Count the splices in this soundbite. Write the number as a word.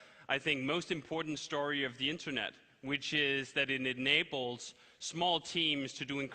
one